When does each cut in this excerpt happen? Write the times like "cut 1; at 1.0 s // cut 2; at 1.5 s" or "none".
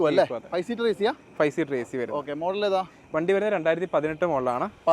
none